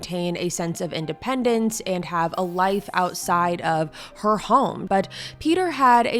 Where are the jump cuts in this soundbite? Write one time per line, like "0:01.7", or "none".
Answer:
0:04.8